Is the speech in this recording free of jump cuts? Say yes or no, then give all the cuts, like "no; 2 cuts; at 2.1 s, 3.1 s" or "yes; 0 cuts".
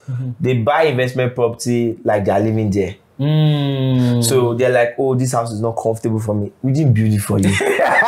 yes; 0 cuts